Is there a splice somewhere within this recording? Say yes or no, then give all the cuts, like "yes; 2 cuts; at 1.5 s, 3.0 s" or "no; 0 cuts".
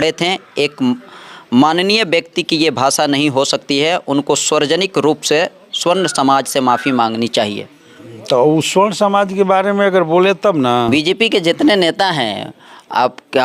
yes; 1 cut; at 10.9 s